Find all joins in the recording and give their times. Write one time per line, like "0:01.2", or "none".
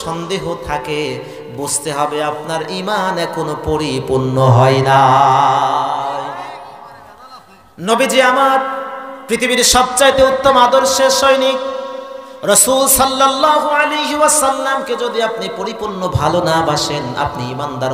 none